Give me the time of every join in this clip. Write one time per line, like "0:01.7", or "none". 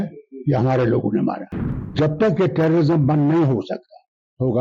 0:01.9

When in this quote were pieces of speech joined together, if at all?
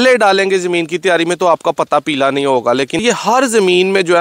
0:03.0

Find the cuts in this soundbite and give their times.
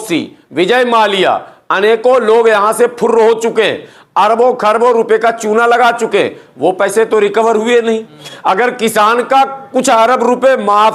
0:08.3

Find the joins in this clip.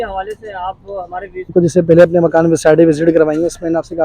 0:01.5

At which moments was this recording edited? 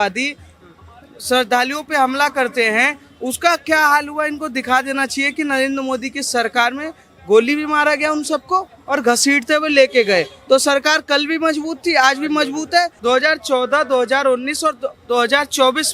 0:13.0

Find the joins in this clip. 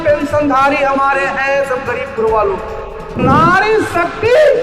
0:03.2

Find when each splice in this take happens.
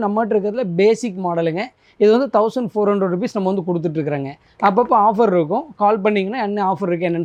none

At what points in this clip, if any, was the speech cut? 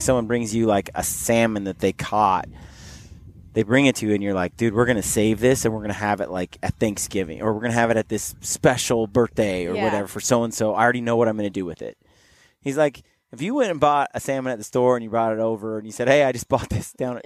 none

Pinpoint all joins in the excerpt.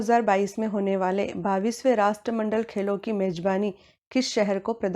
0:03.4

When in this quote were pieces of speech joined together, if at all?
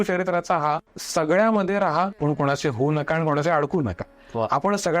0:00.9
0:02.2

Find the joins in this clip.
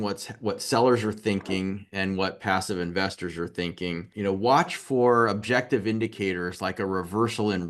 0:04.1

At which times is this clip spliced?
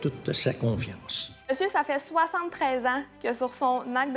0:01.5

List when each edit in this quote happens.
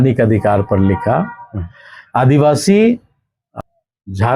0:03.5

